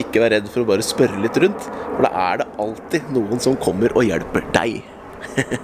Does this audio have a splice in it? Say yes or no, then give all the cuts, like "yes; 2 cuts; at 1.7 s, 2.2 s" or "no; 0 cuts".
no; 0 cuts